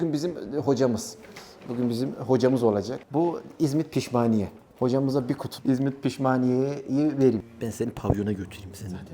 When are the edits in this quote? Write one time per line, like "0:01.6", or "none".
0:03.0
0:07.4